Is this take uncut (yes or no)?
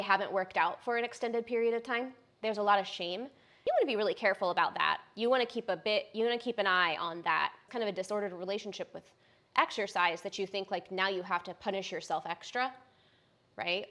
yes